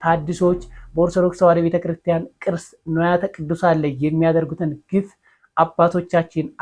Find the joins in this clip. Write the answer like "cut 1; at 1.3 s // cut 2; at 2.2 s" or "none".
none